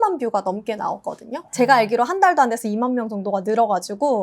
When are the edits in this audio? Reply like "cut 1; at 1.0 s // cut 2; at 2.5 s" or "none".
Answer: none